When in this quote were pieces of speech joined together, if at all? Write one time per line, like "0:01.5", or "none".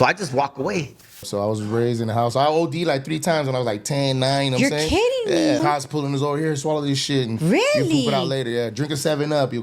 0:01.3
0:05.6